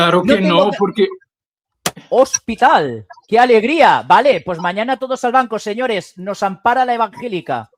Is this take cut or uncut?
uncut